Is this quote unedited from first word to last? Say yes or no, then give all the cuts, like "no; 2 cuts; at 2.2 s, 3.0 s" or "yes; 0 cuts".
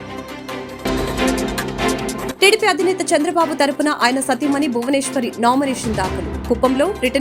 no; 2 cuts; at 0.8 s, 2.3 s